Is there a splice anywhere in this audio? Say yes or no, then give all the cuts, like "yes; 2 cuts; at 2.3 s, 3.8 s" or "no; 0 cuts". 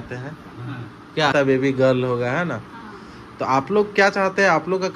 yes; 1 cut; at 1.3 s